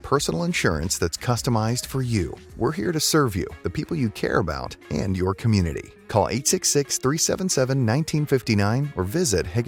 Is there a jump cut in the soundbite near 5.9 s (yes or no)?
no